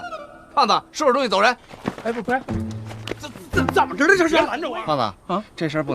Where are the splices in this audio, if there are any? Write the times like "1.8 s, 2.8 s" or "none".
4.6 s